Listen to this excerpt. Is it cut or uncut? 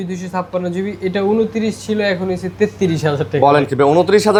uncut